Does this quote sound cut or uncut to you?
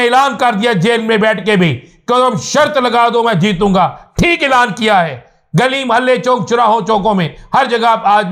uncut